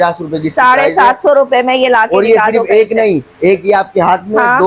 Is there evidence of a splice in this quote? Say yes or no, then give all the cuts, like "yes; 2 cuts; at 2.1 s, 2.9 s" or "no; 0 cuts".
no; 0 cuts